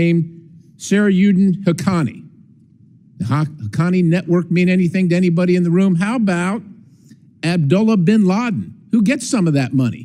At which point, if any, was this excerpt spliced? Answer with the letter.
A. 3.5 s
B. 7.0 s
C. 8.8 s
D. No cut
D